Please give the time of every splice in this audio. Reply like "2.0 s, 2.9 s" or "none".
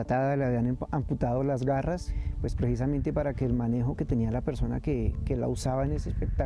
2.1 s